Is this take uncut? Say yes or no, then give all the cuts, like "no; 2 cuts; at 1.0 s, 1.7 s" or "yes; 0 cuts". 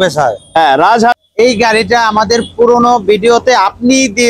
no; 1 cut; at 1.2 s